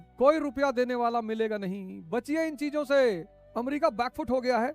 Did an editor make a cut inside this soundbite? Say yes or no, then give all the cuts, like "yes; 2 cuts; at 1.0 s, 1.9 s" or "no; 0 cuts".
yes; 1 cut; at 3.4 s